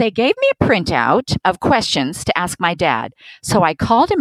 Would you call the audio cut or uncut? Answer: cut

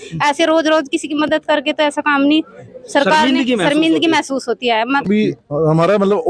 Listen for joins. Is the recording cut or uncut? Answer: cut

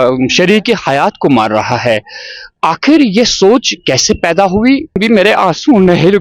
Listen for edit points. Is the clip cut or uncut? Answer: cut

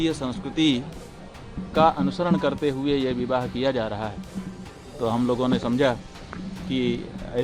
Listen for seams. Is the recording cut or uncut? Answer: uncut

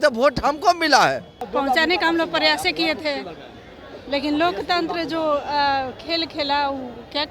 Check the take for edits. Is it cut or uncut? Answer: cut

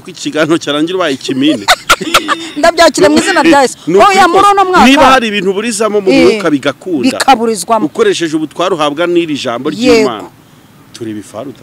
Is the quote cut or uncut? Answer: uncut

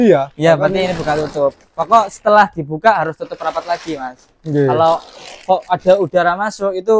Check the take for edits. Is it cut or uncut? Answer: uncut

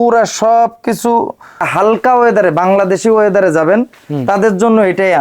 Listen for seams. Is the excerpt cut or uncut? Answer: cut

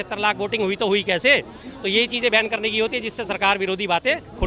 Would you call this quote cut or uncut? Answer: uncut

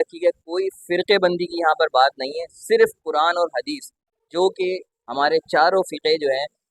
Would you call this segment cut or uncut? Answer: uncut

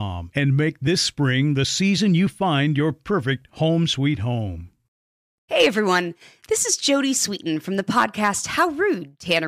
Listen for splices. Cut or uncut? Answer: cut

